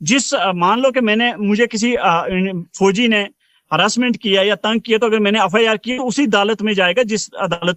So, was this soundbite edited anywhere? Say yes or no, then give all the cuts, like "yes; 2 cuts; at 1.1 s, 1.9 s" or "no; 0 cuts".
no; 0 cuts